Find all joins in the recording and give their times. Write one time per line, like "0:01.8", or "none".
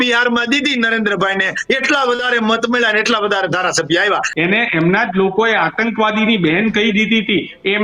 0:04.3